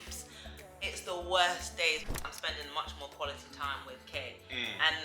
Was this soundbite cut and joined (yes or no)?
yes